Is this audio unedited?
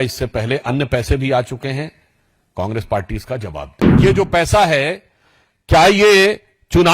no; 1 cut; at 3.8 s

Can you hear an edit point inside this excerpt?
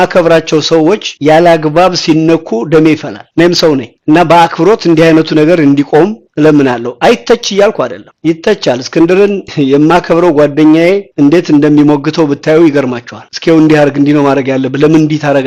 no; 0 cuts

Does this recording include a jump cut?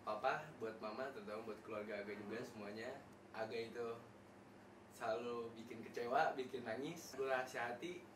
yes; 2 cuts; at 3.1 s, 7.1 s

